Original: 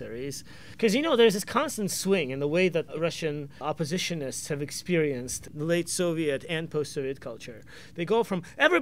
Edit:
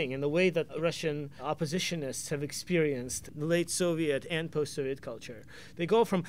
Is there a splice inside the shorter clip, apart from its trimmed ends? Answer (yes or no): no